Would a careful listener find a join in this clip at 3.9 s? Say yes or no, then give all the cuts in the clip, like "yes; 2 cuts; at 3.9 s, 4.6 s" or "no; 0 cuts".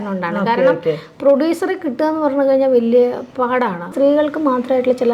yes; 1 cut; at 3.9 s